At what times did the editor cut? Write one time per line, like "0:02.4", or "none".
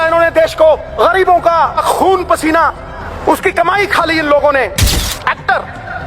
0:00.9
0:01.8
0:03.1
0:05.0